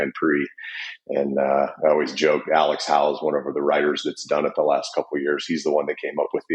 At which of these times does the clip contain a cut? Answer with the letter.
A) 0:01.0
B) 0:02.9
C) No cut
C